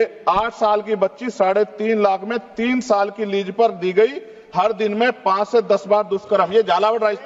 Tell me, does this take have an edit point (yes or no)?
no